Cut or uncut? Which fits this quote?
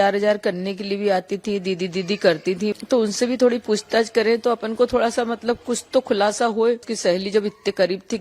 cut